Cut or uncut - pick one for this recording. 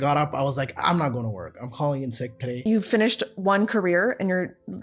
cut